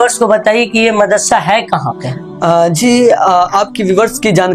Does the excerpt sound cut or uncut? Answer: uncut